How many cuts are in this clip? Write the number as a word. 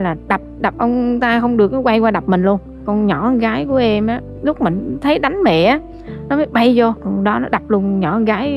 three